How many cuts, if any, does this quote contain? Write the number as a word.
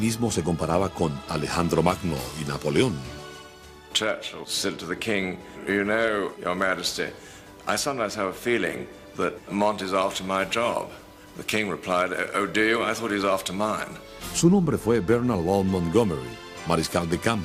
zero